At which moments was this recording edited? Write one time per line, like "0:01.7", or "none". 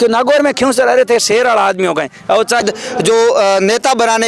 0:02.6